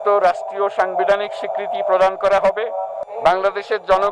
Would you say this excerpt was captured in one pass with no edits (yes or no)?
no